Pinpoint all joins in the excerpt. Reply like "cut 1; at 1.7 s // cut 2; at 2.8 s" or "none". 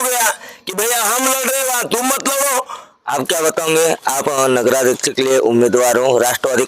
cut 1; at 3.0 s